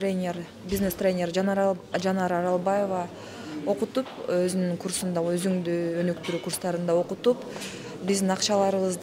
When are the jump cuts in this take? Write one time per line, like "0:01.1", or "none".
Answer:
none